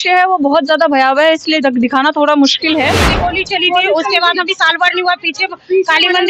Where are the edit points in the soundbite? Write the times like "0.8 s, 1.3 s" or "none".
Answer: 3.0 s